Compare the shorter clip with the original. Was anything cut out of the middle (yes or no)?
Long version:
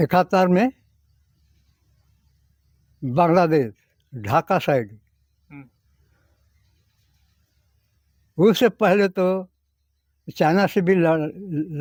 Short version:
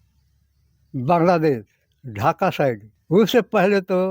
yes